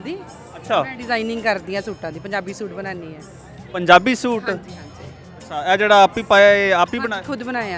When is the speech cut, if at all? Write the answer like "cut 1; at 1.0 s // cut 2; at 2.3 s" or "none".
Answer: none